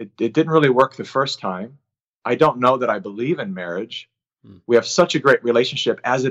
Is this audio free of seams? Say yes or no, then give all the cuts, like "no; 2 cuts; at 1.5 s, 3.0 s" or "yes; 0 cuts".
yes; 0 cuts